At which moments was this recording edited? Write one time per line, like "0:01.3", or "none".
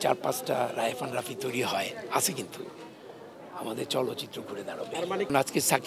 none